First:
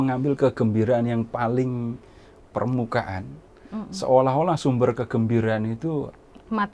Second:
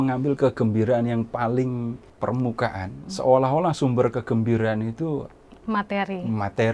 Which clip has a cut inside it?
second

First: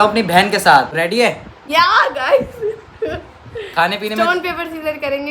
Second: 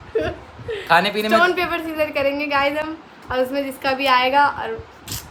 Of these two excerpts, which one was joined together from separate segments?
first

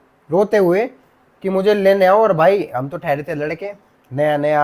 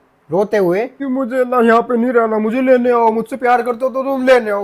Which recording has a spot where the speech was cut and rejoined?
second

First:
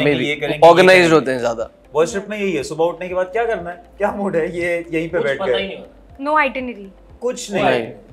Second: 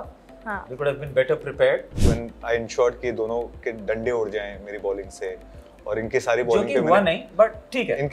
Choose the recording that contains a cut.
second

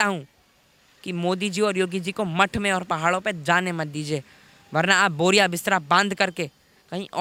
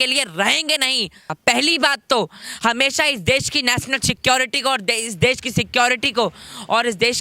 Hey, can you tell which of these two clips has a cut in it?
second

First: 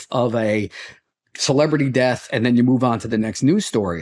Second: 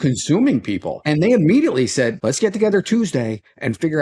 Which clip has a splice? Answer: second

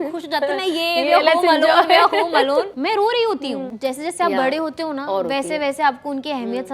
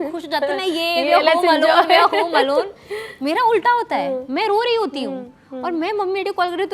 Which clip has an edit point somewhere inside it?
first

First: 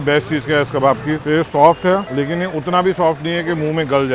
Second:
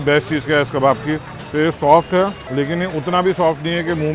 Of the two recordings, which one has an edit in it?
first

